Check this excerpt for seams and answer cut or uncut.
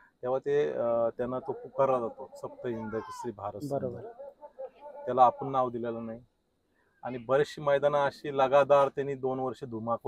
uncut